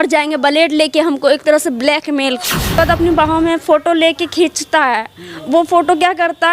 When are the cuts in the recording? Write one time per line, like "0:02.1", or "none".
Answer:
0:02.8